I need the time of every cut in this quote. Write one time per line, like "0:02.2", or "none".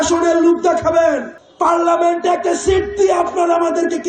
0:01.4